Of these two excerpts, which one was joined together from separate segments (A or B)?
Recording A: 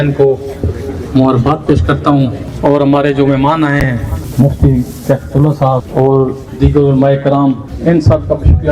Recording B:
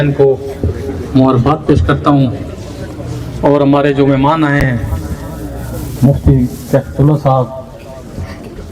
A